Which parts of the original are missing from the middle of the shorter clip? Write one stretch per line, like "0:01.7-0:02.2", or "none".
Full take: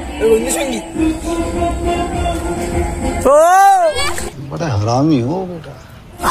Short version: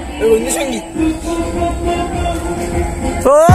none